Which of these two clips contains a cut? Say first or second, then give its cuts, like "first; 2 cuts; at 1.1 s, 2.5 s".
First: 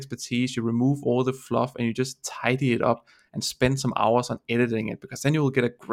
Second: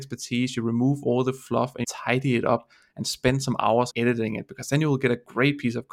second; 2 cuts; at 1.8 s, 3.9 s